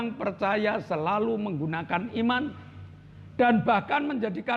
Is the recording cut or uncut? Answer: uncut